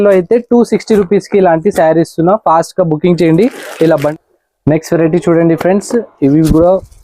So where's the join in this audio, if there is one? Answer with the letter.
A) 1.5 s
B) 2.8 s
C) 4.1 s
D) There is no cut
C